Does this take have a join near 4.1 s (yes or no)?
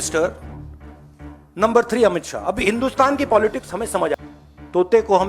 yes